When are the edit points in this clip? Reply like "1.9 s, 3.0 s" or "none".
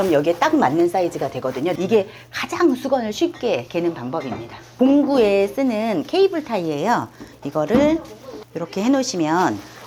1.8 s, 4.6 s